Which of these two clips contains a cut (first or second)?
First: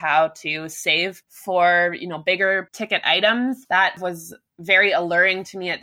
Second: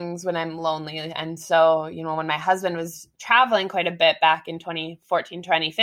first